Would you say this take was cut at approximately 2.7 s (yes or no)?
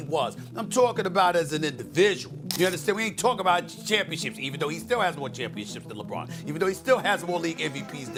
no